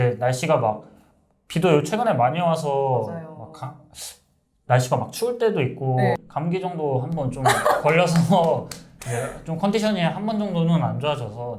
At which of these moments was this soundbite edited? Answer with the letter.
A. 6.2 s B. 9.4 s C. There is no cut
A